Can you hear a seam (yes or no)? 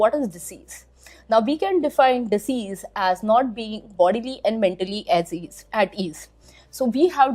yes